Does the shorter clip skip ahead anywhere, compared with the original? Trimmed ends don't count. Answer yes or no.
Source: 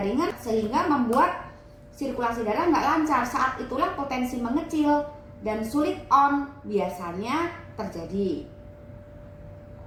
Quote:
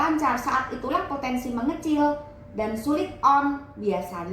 no